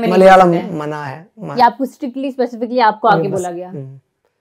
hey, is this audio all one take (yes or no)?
yes